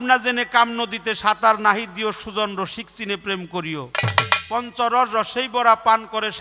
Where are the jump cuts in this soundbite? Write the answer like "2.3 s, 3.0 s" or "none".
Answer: none

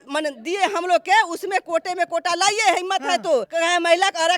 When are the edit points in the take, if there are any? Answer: 3.5 s

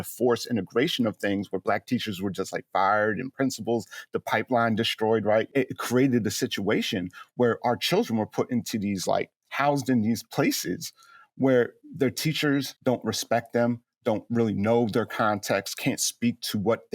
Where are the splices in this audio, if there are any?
5.5 s, 12.7 s

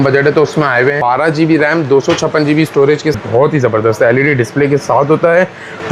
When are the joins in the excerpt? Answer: 1.0 s, 3.2 s

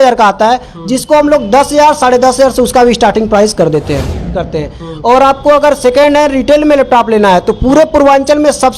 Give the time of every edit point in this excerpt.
4.5 s

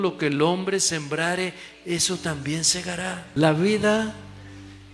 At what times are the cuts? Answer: 3.2 s

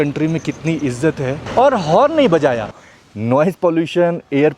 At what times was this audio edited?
1.4 s, 2.7 s

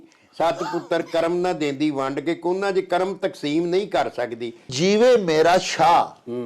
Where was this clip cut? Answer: 4.7 s

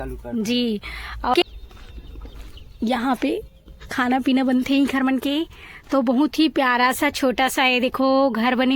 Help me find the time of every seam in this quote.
1.3 s

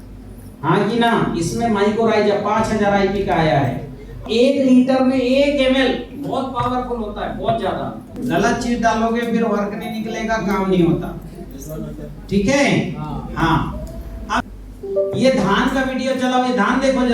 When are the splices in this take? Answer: 4.2 s, 8.1 s, 14.4 s

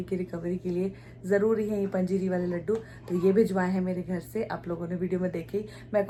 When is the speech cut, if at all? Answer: none

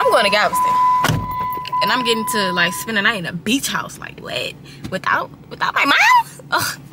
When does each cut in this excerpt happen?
none

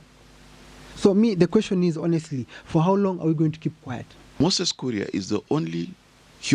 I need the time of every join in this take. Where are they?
4.4 s

